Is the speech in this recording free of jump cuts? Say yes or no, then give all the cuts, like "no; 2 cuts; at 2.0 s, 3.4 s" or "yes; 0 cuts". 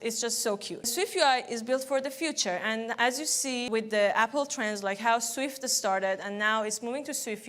no; 2 cuts; at 0.9 s, 3.7 s